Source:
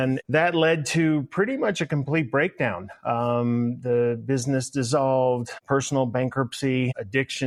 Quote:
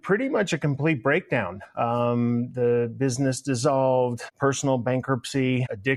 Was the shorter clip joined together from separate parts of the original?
no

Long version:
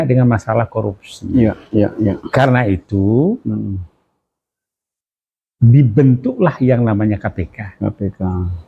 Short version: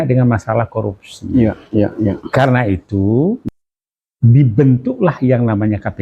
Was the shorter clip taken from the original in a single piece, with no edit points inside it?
no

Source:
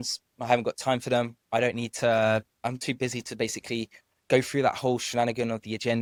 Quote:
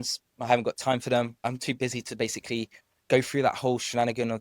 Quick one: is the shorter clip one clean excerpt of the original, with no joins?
no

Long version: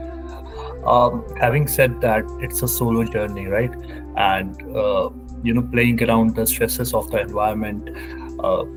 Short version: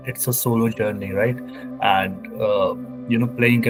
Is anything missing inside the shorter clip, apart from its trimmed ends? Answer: no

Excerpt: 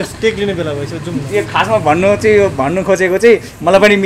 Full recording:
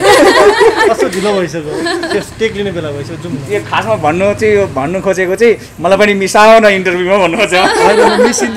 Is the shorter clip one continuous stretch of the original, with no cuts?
yes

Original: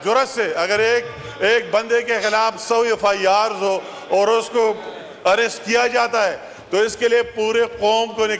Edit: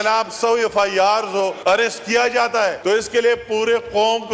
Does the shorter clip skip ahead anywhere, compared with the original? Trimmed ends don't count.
yes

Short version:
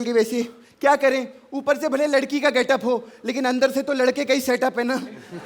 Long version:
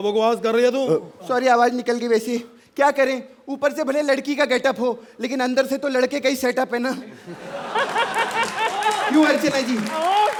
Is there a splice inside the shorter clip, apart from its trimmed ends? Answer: no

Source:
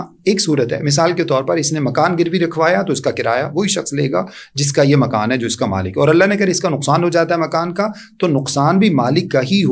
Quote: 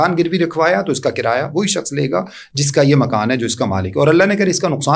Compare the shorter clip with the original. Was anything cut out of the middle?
no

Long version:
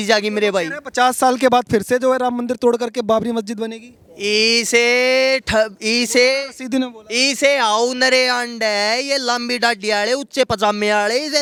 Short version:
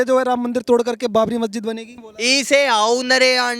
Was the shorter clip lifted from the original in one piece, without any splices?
no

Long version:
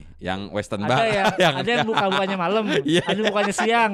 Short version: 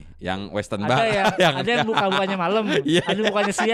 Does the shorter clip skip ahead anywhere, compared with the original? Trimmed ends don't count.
no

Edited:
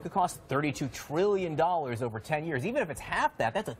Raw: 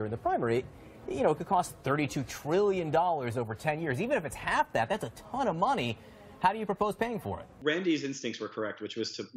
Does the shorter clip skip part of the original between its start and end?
no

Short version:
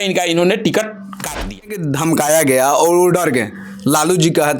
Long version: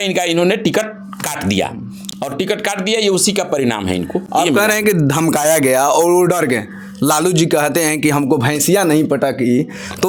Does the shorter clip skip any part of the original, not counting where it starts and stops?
yes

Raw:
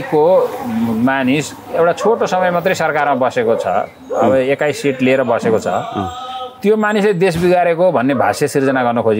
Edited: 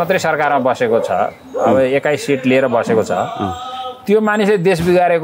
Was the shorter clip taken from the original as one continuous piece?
yes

